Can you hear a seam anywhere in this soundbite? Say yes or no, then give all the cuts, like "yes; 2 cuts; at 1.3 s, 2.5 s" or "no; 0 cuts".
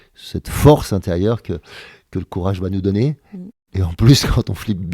no; 0 cuts